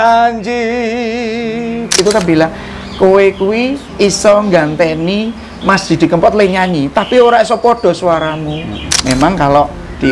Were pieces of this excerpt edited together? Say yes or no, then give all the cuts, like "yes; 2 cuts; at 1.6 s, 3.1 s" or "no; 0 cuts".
yes; 2 cuts; at 2.0 s, 8.9 s